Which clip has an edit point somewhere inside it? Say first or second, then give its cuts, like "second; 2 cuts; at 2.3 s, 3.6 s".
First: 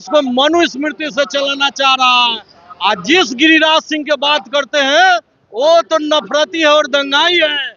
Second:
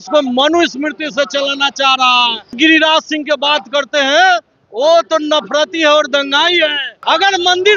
second; 2 cuts; at 2.5 s, 6.9 s